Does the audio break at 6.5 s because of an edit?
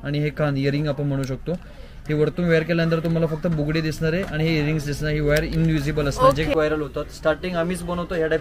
yes; 1 cut; at 6.5 s

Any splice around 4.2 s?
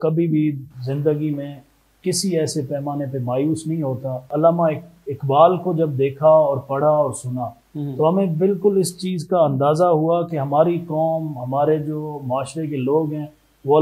yes; 1 cut; at 4.2 s

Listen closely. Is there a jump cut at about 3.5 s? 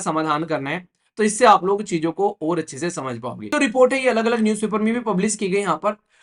yes; 1 cut; at 3.5 s

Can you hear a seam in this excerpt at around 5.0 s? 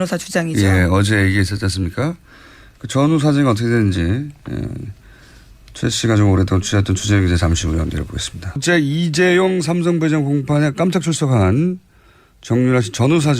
no; 1 cut; at 9.6 s

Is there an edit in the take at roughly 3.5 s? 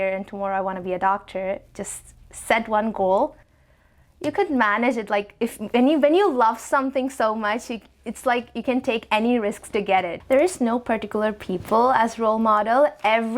yes; 2 cuts; at 3.5 s, 10.2 s

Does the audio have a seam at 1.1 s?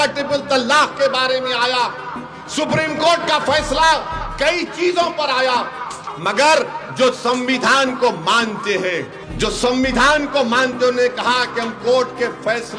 no; 2 cuts; at 6.0 s, 9.2 s

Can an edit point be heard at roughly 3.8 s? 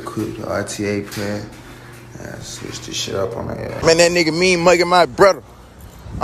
yes; 1 cut; at 3.8 s

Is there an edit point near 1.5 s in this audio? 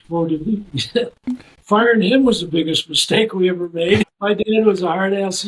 no; 1 cut; at 4.1 s

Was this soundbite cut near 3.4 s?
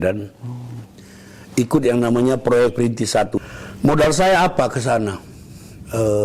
yes; 1 cut; at 3.4 s

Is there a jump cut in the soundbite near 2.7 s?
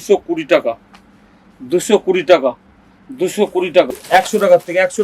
no; 1 cut; at 3.9 s

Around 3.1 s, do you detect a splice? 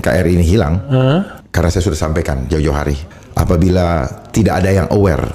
yes; 2 cuts; at 1.4 s, 3.1 s

